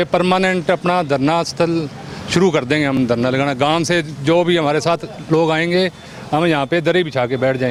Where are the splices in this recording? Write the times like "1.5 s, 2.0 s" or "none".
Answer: none

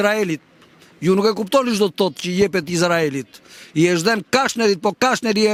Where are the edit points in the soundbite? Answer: none

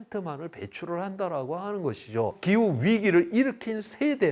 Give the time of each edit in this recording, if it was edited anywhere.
2.4 s

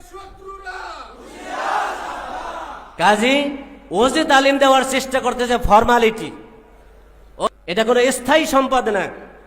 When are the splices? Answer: 7.5 s

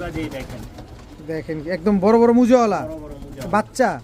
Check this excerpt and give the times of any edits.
none

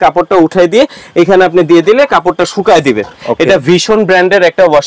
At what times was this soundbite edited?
3.1 s

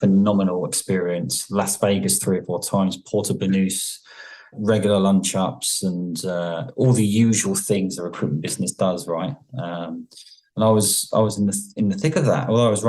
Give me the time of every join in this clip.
4.5 s

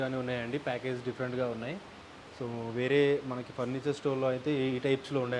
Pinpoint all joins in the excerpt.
none

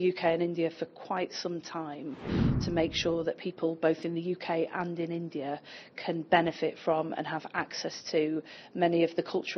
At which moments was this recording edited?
2.3 s

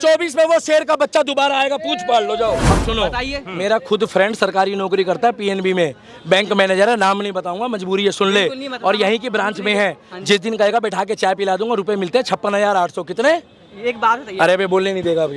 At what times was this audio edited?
2.7 s

